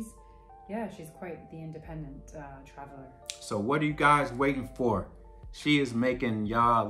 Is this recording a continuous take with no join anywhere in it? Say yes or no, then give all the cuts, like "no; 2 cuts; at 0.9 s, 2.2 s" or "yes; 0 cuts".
yes; 0 cuts